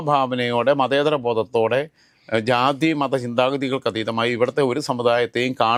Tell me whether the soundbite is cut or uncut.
uncut